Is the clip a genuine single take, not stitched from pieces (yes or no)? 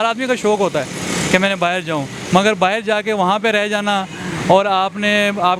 yes